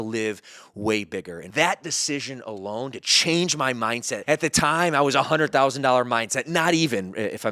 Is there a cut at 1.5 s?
yes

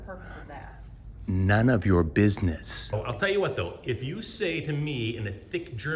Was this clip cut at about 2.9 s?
yes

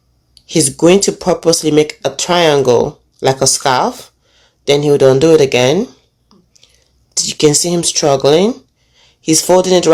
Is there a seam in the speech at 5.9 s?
no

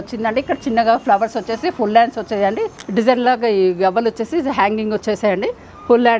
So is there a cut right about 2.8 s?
yes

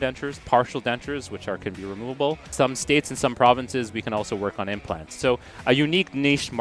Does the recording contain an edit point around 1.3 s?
no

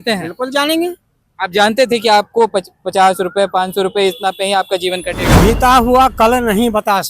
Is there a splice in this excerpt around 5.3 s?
yes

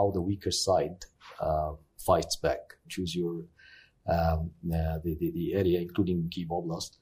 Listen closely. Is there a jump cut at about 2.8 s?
yes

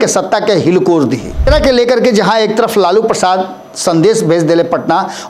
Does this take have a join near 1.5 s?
yes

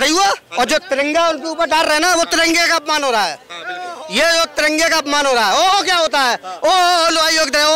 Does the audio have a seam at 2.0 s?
no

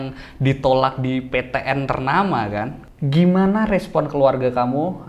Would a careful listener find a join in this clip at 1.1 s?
no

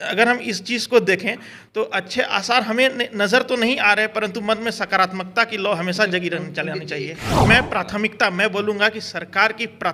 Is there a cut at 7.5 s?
yes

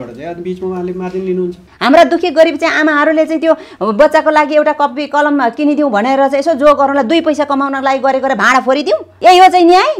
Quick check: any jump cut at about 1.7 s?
yes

